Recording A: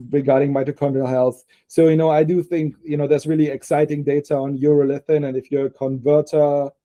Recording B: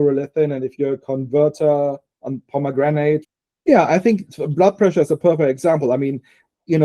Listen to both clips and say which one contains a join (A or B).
B